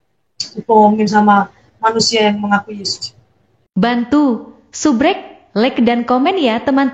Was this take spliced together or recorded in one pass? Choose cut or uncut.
cut